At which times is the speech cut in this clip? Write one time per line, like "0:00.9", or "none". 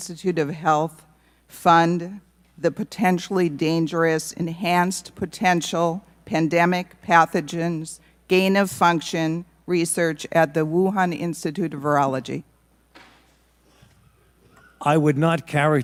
none